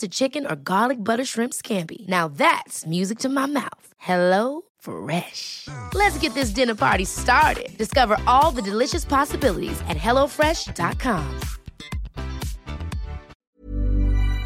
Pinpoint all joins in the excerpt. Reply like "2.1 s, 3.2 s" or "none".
13.4 s